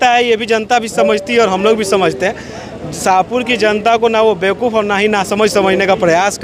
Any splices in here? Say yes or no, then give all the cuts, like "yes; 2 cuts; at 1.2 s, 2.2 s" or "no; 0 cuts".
no; 0 cuts